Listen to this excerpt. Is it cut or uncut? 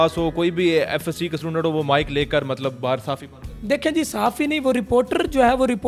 uncut